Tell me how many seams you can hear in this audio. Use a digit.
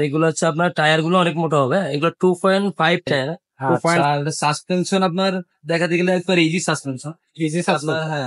1